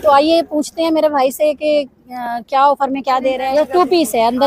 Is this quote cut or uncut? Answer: cut